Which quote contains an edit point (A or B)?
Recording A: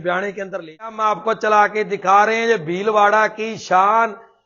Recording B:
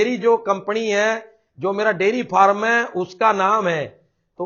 A